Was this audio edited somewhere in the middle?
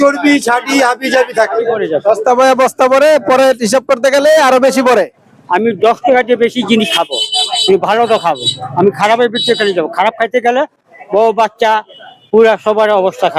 yes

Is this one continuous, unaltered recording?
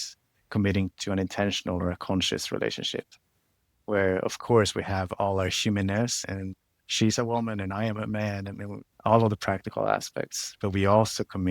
no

